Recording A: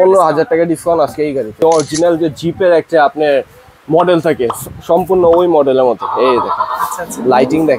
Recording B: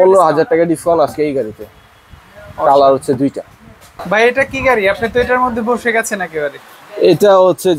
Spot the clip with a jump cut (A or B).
A